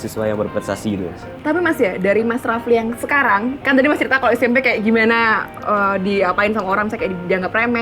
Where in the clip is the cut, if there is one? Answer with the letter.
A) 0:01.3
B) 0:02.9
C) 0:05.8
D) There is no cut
A